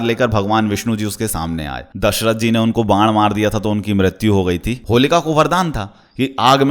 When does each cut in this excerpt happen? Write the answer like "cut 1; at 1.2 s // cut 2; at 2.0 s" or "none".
cut 1; at 1.9 s // cut 2; at 4.7 s